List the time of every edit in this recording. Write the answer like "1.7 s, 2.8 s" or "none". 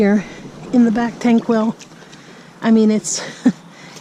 none